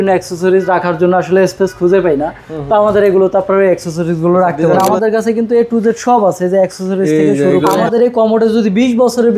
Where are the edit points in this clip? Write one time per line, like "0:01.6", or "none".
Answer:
0:04.8
0:07.8